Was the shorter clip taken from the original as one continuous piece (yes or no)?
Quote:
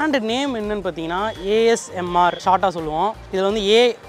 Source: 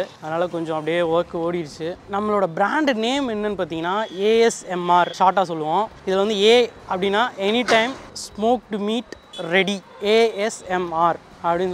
yes